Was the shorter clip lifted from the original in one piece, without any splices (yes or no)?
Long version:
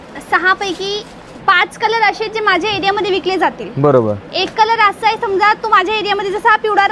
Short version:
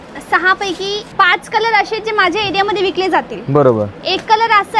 no